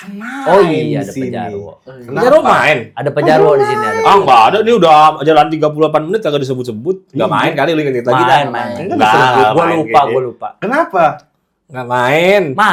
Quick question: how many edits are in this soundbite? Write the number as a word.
zero